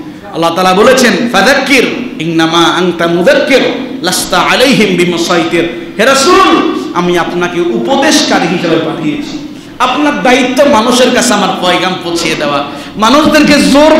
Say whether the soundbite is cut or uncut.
uncut